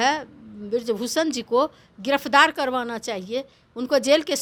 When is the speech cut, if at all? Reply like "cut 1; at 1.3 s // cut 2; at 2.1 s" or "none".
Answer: none